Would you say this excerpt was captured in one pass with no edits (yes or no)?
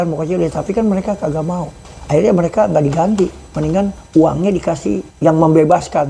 no